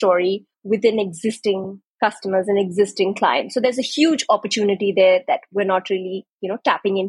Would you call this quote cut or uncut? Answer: uncut